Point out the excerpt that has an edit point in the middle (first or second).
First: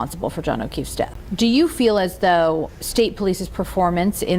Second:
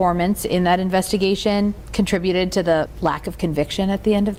first